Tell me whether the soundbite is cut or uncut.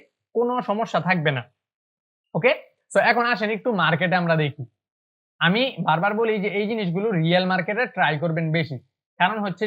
uncut